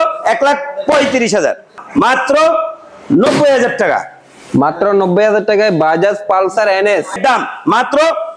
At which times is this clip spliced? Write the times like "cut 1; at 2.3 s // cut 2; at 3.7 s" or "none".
cut 1; at 1.8 s // cut 2; at 7.2 s